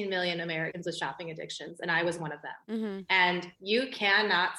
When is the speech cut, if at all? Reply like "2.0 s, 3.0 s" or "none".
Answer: none